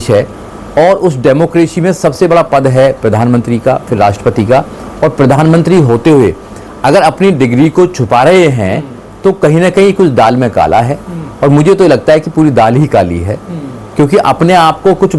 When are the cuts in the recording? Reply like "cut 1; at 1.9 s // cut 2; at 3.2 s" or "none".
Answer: none